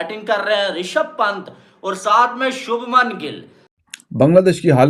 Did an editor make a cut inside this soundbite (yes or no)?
yes